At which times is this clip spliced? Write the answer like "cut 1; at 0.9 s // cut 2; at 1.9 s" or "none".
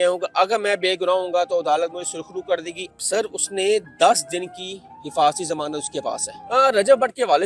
cut 1; at 2.8 s // cut 2; at 6.3 s